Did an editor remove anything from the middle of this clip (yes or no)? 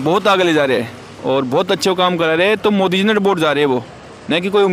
no